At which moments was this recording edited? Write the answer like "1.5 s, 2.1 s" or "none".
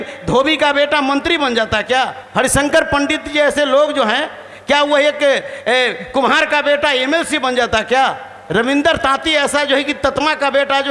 none